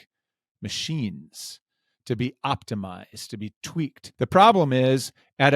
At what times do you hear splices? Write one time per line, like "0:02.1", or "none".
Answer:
0:04.0